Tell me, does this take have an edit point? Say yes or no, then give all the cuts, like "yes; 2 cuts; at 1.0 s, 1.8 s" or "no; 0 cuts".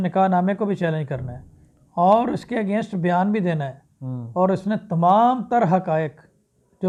no; 0 cuts